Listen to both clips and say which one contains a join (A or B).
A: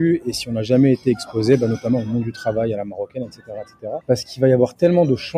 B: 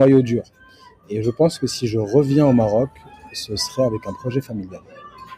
A